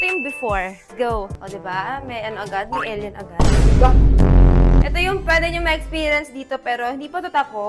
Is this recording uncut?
no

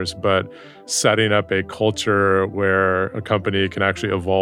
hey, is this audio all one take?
yes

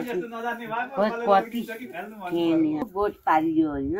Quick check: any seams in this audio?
yes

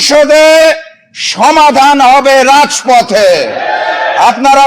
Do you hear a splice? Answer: no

